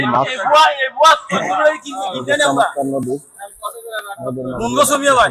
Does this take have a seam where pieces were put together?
no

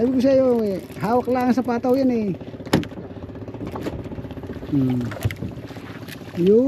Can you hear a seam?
no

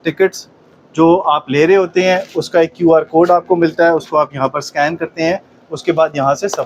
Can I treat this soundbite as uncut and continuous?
yes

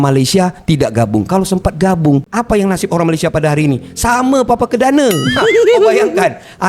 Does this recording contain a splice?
no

